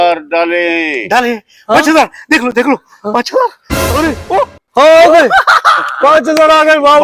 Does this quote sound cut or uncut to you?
uncut